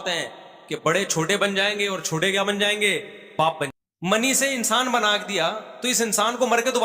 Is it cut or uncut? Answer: cut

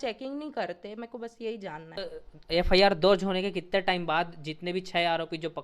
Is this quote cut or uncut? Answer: cut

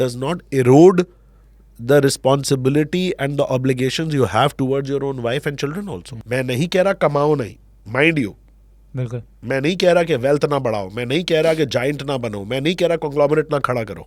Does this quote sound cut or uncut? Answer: cut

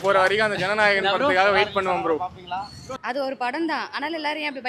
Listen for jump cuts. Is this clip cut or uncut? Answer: cut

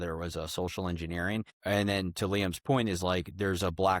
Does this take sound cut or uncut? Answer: cut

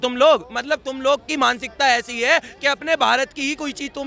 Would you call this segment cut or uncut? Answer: uncut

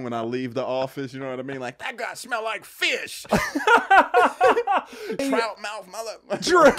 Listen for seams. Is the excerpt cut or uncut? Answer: cut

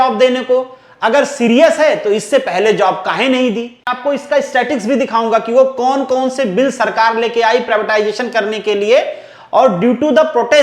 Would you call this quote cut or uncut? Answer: cut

